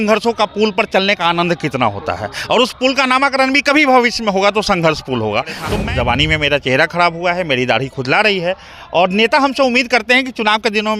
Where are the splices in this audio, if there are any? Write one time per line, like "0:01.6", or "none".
0:05.6